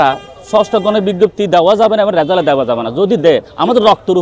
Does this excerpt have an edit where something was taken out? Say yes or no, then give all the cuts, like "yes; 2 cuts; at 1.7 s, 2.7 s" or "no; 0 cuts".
no; 0 cuts